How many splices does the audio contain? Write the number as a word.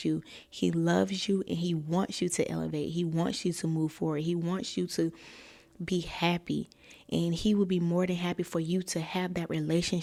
zero